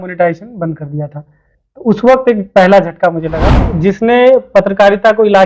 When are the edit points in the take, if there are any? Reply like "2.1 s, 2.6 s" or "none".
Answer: 3.7 s